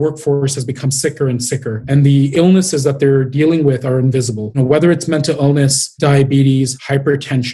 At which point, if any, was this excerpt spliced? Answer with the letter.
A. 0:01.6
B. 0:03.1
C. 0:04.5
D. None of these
C